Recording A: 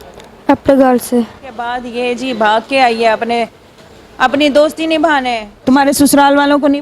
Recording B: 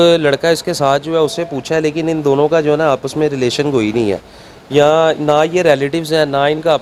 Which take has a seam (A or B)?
A